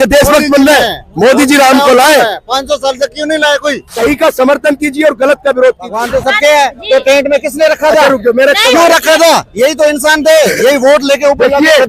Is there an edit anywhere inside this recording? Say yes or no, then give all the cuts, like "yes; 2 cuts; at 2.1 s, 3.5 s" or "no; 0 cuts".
yes; 2 cuts; at 3.8 s, 5.9 s